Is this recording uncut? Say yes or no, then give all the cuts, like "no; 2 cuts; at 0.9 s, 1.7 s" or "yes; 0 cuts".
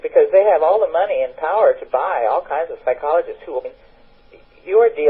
yes; 0 cuts